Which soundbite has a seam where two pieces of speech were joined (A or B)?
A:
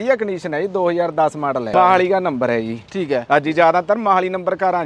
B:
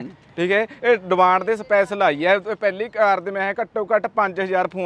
A